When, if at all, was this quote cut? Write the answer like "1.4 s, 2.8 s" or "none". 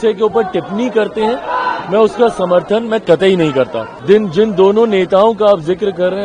3.9 s